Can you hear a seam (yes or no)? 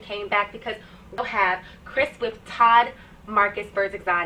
yes